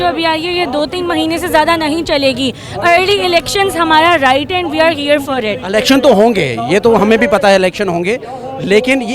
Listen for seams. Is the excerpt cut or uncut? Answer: uncut